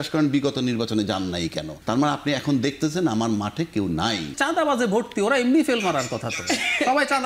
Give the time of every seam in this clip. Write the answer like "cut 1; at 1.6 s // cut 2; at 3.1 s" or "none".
cut 1; at 1.7 s // cut 2; at 4.4 s